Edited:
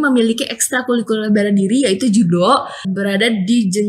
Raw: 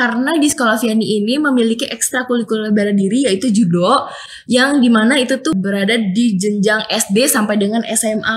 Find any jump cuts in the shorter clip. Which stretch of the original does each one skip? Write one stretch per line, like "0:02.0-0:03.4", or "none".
0:04.3-0:05.6